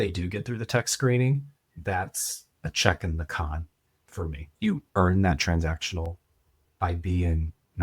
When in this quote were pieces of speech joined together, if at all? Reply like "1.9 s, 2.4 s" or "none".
4.5 s